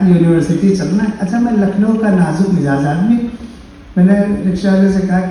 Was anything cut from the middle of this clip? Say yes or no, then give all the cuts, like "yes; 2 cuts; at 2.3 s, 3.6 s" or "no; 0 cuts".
no; 0 cuts